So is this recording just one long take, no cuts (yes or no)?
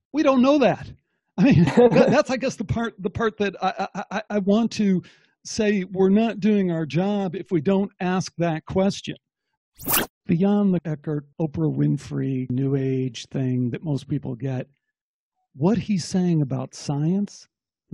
no